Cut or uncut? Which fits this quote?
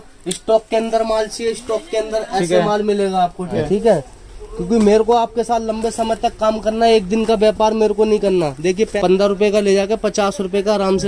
cut